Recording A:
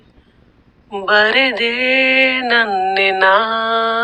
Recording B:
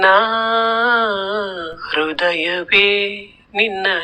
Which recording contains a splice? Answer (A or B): B